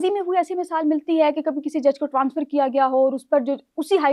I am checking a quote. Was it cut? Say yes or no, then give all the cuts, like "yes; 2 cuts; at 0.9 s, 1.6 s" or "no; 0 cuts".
no; 0 cuts